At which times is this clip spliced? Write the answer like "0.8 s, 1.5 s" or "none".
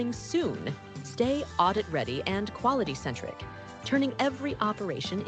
1.0 s